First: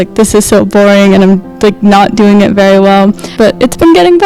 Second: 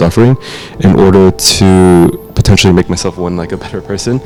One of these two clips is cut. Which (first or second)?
first